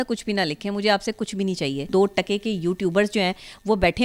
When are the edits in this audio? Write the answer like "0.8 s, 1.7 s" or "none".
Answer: 1.9 s